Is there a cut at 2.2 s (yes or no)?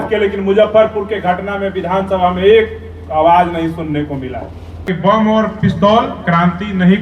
no